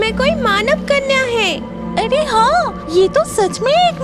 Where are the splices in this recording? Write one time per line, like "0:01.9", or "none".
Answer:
0:02.8